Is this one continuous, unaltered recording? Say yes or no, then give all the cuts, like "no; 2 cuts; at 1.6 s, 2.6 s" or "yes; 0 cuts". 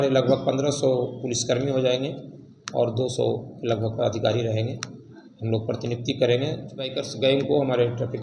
no; 1 cut; at 7.0 s